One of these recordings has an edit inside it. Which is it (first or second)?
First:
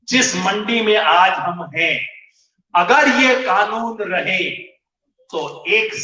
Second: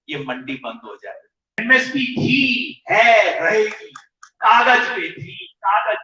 second